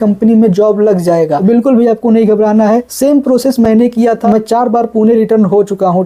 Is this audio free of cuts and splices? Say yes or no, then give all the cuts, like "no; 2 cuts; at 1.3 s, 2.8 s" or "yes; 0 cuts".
no; 3 cuts; at 1.3 s, 2.9 s, 4.2 s